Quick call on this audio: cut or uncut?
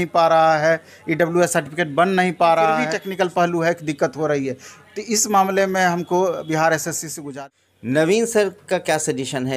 cut